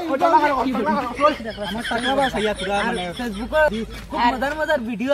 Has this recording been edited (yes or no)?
yes